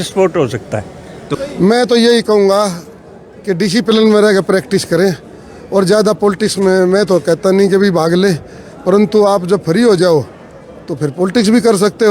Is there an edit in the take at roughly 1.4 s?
yes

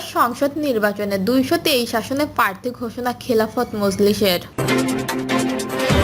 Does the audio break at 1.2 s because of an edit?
no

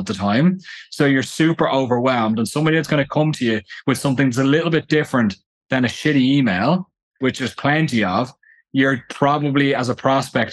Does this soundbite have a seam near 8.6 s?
no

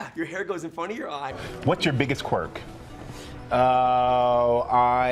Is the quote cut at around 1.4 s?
yes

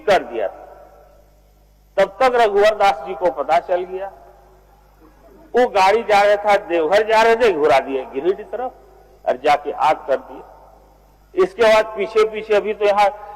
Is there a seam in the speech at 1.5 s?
no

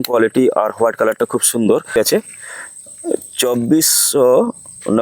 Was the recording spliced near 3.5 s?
no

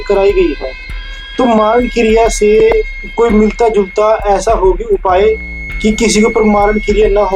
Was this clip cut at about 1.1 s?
no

